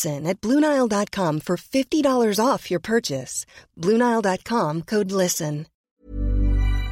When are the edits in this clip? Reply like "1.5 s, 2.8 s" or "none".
5.7 s